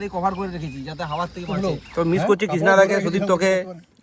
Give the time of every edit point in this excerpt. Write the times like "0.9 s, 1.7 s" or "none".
1.4 s